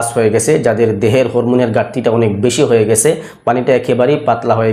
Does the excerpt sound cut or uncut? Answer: uncut